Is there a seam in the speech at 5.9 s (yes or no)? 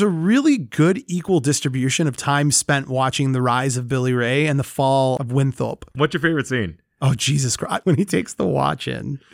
yes